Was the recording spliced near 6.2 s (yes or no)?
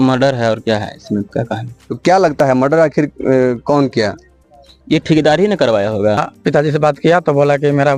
yes